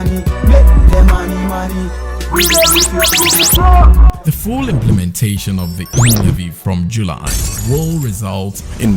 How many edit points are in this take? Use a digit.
1